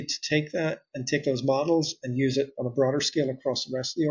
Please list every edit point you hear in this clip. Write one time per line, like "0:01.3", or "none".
none